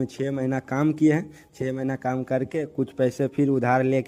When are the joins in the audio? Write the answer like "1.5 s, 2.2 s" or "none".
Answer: none